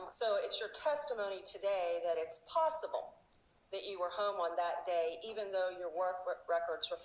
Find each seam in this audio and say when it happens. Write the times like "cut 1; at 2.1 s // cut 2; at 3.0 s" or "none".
none